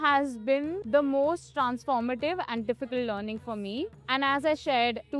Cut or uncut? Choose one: uncut